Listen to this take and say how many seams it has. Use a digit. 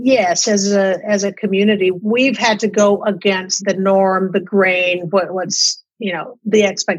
2